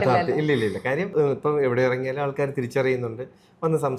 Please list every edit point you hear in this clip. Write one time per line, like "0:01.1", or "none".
0:01.1